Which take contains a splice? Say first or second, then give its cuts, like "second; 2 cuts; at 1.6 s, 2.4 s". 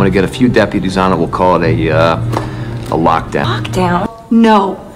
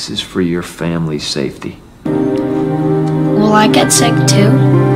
first; 1 cut; at 4.0 s